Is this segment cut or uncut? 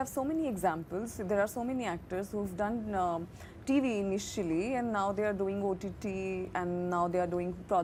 uncut